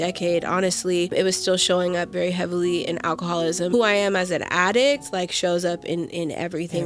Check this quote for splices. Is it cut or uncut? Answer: cut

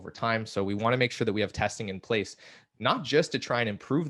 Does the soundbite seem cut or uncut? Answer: uncut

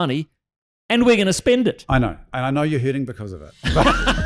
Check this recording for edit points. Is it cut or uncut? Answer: uncut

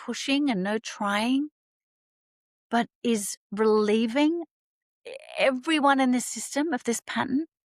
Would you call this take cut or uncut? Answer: uncut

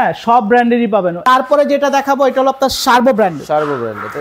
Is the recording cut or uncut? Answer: cut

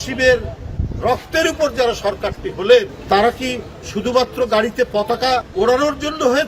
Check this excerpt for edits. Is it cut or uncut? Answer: cut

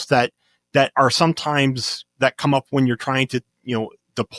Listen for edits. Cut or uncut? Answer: uncut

